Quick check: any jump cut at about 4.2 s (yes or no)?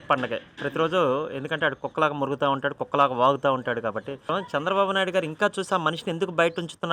yes